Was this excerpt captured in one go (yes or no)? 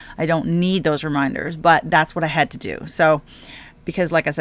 yes